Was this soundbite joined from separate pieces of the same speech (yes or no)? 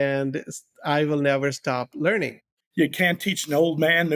yes